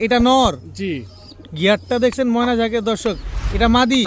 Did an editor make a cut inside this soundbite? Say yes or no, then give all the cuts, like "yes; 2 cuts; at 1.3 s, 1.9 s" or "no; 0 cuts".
no; 0 cuts